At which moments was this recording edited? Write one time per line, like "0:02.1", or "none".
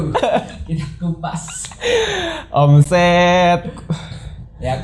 none